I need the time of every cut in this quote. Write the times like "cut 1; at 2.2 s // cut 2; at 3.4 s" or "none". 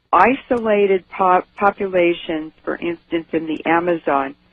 cut 1; at 1.5 s